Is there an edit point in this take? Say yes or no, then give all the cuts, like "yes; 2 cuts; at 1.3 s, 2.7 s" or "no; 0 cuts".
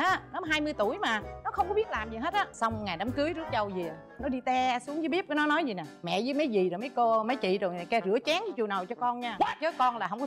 yes; 2 cuts; at 1.4 s, 2.5 s